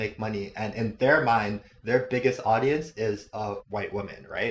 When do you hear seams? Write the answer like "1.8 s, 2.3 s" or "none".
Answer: 3.6 s